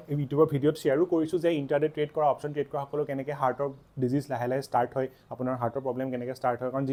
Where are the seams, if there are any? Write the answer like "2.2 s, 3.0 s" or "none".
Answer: none